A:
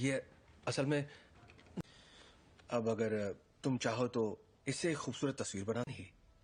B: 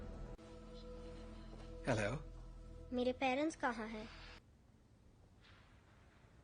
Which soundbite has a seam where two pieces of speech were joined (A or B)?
B